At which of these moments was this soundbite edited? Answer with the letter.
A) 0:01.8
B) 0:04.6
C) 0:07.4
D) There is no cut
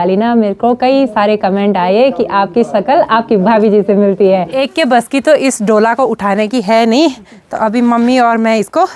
B